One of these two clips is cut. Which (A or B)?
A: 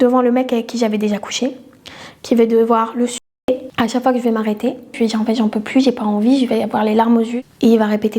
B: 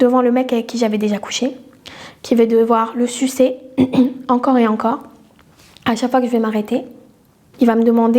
A